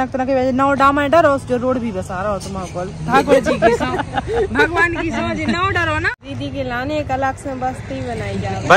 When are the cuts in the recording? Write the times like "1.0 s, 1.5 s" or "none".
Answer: 6.1 s